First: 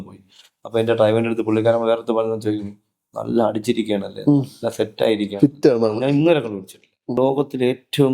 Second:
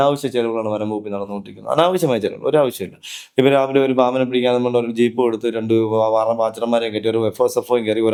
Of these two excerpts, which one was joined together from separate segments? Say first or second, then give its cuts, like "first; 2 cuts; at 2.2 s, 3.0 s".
first; 1 cut; at 7.2 s